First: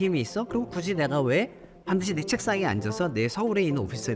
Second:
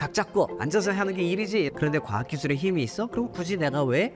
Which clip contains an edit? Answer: second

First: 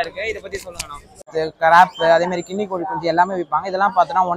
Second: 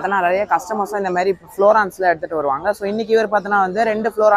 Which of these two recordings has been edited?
first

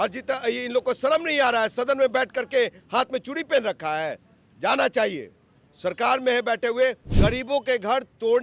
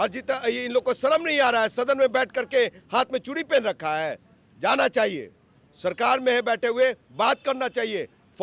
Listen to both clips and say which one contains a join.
first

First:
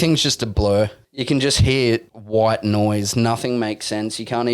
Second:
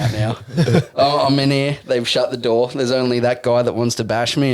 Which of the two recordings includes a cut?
first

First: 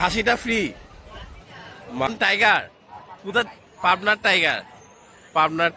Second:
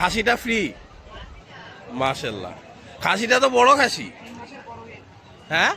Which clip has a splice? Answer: first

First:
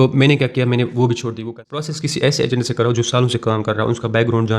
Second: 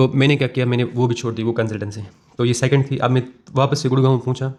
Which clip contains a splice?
first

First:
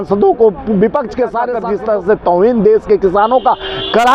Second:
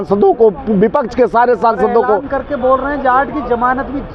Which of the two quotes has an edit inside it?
first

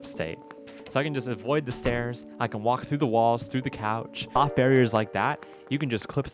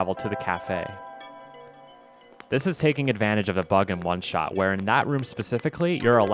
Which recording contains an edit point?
first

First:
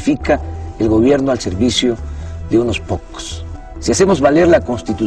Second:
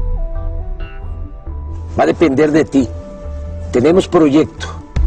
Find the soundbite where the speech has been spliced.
first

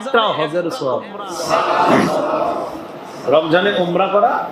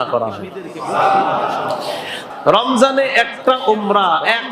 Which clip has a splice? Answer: second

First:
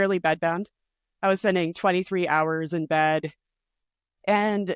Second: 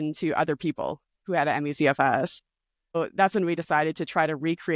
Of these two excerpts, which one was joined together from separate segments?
second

